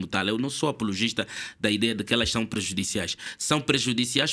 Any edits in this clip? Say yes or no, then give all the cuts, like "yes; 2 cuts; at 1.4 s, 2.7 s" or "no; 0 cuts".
no; 0 cuts